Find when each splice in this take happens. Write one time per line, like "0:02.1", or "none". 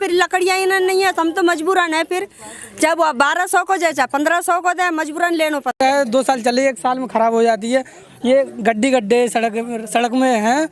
0:05.8